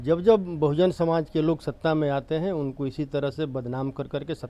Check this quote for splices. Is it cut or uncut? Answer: uncut